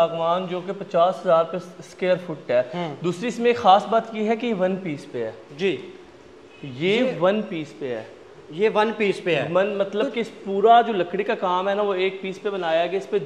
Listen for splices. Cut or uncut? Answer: uncut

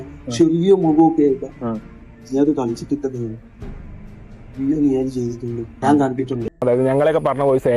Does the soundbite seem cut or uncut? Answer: cut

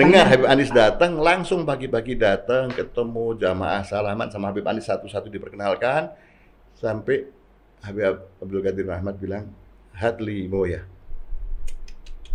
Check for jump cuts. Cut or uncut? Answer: uncut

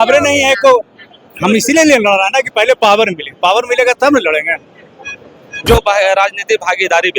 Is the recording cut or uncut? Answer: cut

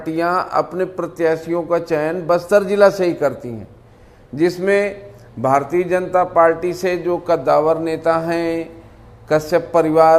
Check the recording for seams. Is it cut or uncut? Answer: uncut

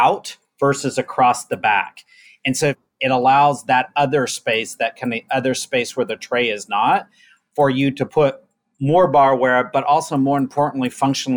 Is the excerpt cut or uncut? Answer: cut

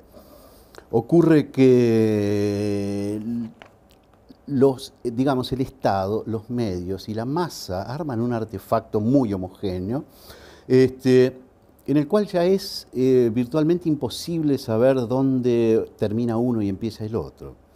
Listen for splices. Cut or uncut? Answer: cut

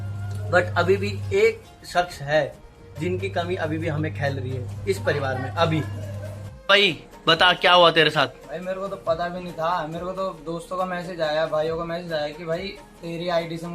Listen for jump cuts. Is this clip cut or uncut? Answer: cut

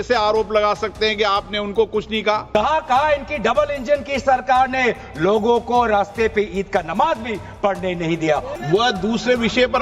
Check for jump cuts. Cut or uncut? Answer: cut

